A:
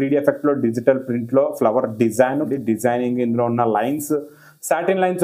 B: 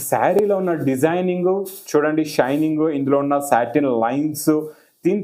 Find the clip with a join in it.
A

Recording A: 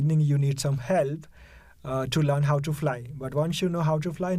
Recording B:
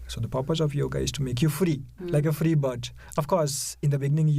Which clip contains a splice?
B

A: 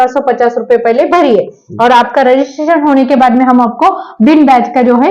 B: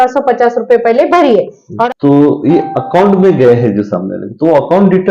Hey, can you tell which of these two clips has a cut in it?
B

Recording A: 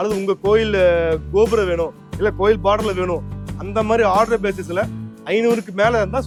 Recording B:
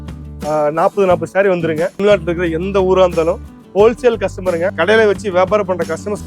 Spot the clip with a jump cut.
B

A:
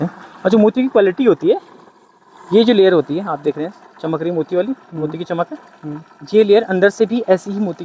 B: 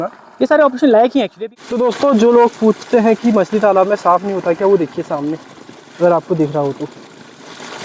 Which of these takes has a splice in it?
B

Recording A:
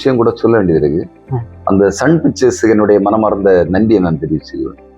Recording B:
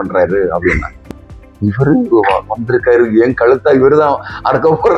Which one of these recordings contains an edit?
B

